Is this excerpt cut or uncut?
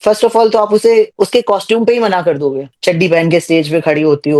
cut